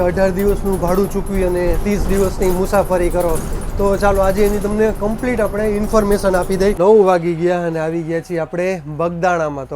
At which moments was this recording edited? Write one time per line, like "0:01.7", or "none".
0:06.8